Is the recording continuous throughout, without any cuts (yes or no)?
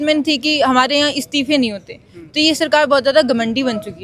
yes